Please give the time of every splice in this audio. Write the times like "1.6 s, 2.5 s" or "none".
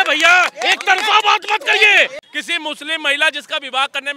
2.2 s